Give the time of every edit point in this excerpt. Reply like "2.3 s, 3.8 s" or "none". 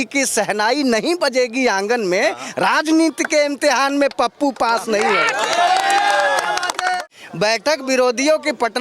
7.0 s